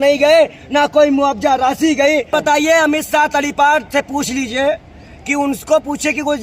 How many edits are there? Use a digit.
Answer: 1